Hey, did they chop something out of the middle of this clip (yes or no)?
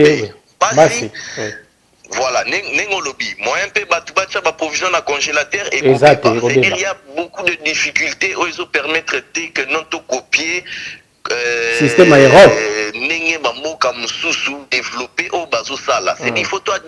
no